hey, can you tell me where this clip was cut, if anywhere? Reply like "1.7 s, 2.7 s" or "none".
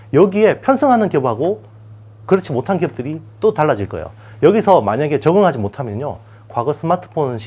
none